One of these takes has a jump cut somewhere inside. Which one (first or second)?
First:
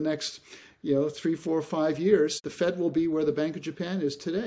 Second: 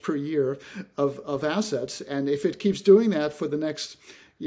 first